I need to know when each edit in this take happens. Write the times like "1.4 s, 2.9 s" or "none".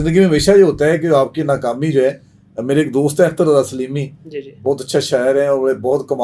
none